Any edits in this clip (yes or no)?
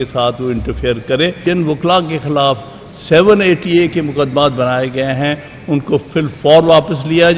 yes